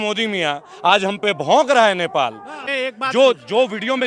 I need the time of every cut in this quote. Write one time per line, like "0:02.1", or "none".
0:02.5